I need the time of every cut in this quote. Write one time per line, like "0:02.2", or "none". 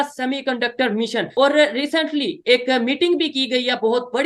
0:01.3